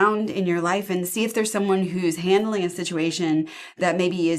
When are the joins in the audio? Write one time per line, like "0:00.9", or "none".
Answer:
none